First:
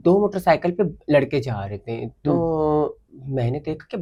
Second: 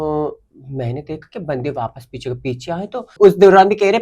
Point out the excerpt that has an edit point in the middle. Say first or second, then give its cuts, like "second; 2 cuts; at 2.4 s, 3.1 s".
second; 1 cut; at 3.1 s